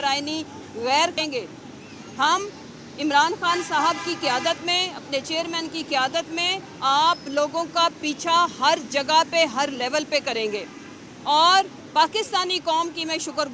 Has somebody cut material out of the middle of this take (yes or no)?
yes